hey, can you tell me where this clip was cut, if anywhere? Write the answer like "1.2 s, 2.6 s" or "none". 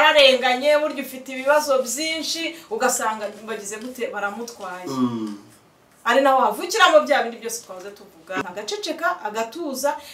8.4 s